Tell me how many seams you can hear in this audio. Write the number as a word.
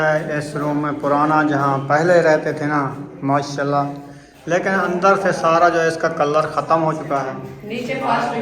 one